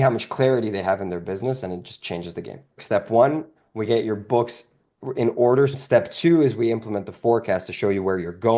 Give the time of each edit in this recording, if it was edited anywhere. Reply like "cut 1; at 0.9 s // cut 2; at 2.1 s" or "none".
cut 1; at 2.7 s // cut 2; at 5.8 s